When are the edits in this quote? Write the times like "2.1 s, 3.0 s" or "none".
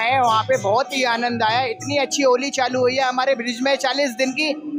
none